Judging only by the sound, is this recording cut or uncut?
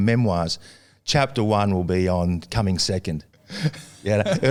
uncut